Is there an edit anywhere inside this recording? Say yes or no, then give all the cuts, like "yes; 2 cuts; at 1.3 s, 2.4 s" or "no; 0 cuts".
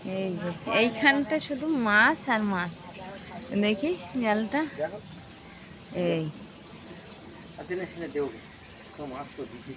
no; 0 cuts